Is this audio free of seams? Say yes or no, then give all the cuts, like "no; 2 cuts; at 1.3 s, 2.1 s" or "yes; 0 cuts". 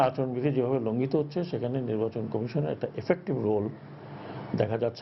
yes; 0 cuts